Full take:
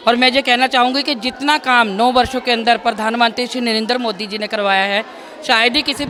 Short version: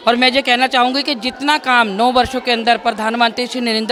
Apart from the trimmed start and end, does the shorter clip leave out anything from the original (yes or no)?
no